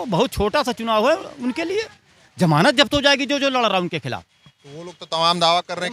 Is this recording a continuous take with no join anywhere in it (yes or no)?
yes